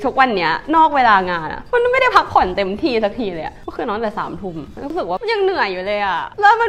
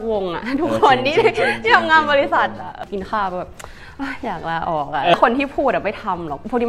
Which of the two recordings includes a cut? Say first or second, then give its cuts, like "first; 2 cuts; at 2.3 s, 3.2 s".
second; 2 cuts; at 2.7 s, 5.1 s